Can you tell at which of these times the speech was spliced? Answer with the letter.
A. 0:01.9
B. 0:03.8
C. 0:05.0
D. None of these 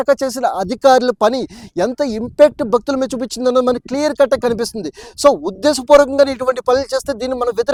D